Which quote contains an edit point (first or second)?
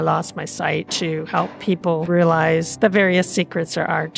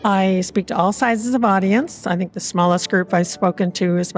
first